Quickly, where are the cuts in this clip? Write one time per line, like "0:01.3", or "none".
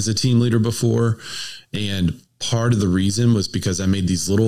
none